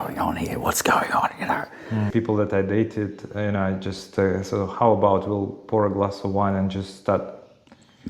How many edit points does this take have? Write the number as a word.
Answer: one